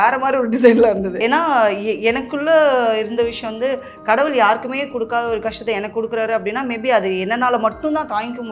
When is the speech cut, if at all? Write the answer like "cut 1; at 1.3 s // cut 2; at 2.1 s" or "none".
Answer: cut 1; at 1.2 s